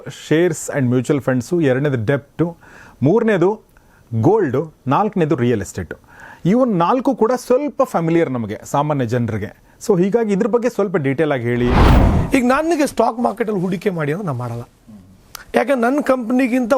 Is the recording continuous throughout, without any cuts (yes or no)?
no